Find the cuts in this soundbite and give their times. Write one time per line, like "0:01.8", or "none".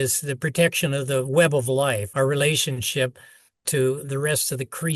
0:02.1